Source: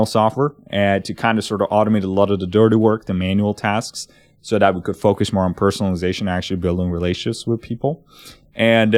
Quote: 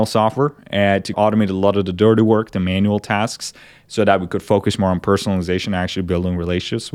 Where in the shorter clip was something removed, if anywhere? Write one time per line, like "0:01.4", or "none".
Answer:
0:01.1